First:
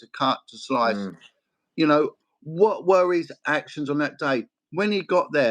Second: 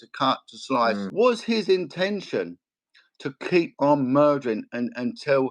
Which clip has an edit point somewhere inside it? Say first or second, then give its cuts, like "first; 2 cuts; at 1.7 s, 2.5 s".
second; 1 cut; at 1.1 s